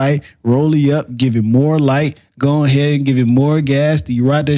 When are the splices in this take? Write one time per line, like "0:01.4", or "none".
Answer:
none